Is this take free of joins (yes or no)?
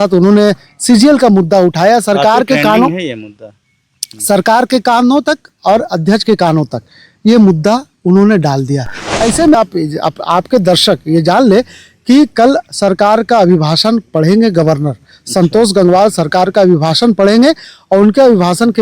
no